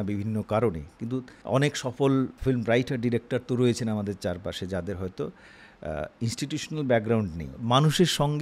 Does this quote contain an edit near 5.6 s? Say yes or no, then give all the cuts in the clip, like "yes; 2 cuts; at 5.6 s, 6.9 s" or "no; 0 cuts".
no; 3 cuts; at 1.3 s, 2.4 s, 7.5 s